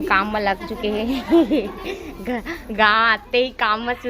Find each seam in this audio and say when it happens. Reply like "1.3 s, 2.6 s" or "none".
1.3 s